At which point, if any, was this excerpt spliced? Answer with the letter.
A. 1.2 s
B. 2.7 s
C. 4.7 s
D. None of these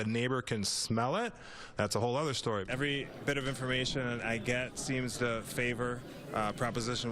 B